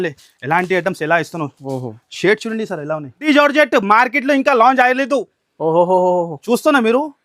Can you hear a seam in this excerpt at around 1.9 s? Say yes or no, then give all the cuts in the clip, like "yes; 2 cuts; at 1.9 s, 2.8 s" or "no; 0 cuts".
no; 1 cut; at 3.2 s